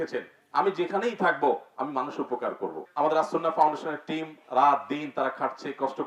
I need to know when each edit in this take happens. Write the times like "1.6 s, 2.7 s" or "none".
2.8 s